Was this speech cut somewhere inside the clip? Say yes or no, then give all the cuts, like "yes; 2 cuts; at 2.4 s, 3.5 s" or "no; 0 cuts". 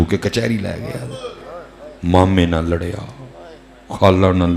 no; 0 cuts